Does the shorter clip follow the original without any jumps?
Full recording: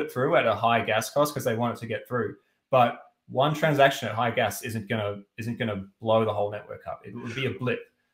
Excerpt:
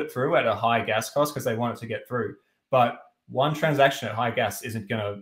yes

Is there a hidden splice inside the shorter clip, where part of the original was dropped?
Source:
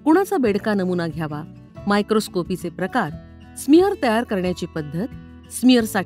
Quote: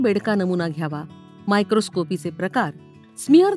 no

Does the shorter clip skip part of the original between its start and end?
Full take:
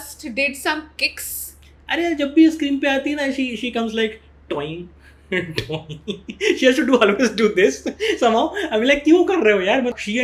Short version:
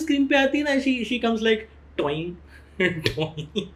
no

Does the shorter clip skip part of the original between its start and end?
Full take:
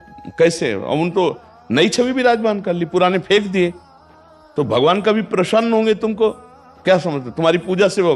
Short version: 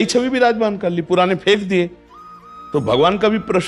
no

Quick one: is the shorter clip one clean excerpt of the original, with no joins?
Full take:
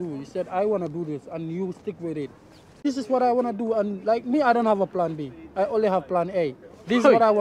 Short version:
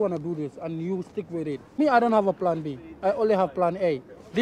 no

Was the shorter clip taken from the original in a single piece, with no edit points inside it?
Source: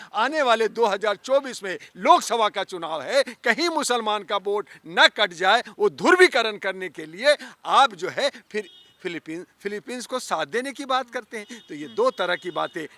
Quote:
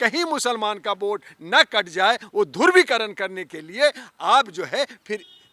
yes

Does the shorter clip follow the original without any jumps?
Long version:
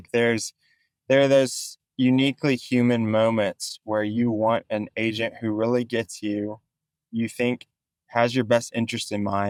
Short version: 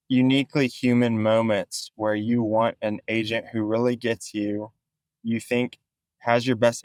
yes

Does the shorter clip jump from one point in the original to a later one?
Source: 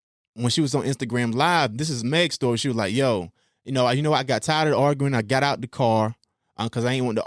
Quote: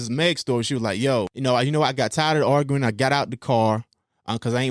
yes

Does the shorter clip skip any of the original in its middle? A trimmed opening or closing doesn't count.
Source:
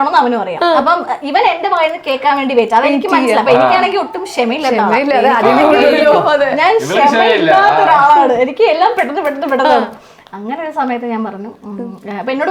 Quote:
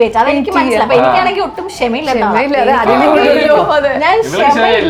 no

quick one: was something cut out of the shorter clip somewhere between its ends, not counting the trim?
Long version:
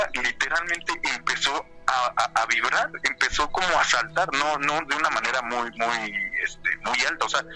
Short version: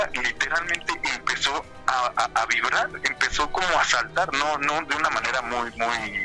no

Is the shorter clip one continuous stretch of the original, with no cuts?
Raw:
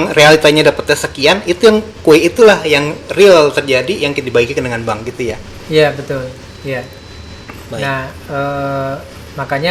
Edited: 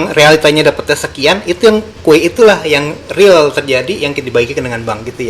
yes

